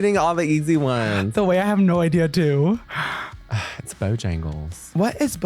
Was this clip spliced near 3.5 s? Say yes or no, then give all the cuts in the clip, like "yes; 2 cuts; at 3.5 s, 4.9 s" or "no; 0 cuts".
yes; 1 cut; at 3.5 s